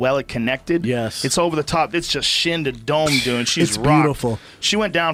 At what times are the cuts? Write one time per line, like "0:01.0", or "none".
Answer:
none